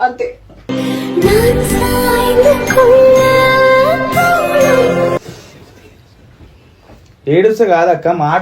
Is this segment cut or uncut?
cut